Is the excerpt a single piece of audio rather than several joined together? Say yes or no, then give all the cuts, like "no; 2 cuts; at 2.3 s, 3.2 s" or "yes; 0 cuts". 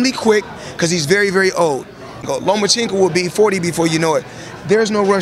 no; 1 cut; at 2.3 s